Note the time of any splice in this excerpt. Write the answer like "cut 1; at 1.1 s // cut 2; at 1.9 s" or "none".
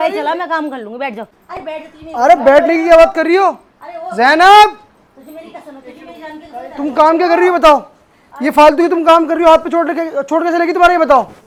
none